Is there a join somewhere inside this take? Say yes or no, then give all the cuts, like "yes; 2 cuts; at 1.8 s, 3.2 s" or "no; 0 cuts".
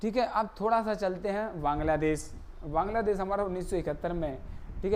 no; 0 cuts